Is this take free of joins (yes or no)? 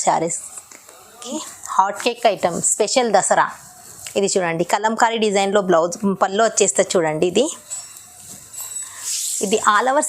no